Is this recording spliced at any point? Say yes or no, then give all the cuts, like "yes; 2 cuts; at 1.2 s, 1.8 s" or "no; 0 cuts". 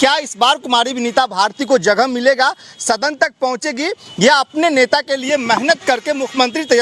no; 0 cuts